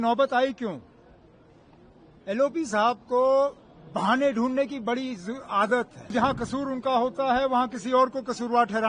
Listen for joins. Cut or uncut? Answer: cut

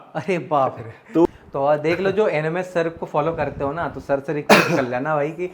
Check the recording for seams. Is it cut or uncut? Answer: cut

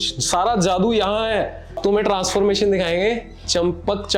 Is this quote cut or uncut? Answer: cut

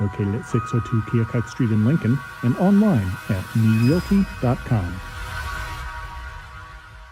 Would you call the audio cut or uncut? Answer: uncut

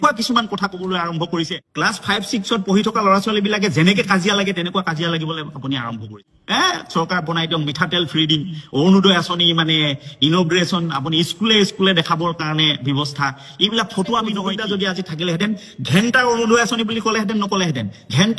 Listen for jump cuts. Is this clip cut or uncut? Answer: uncut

